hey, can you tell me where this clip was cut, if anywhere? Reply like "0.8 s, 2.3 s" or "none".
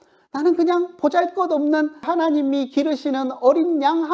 2.1 s

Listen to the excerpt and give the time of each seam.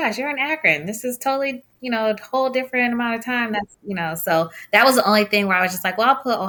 none

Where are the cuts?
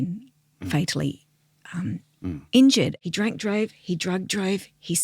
3.0 s

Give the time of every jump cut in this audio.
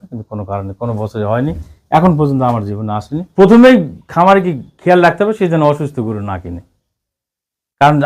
3.2 s

